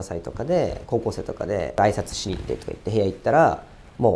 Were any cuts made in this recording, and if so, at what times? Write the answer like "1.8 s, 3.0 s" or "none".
1.7 s